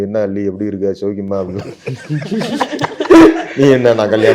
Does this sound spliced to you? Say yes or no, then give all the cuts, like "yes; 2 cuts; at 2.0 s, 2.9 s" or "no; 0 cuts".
no; 0 cuts